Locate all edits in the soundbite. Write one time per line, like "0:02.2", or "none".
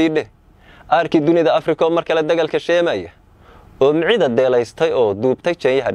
none